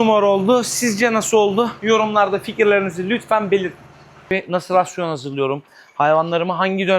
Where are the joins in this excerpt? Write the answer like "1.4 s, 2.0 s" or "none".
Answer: 4.3 s